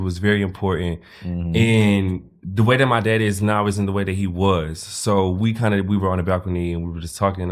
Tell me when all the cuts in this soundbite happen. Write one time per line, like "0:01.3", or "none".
none